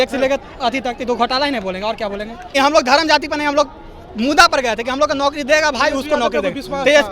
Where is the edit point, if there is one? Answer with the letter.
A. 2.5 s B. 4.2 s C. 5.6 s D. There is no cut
A